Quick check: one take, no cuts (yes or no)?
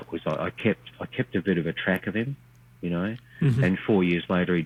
yes